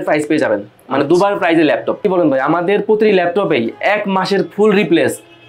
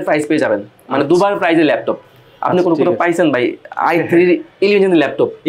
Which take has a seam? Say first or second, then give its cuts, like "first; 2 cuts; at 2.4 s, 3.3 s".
first; 1 cut; at 2.0 s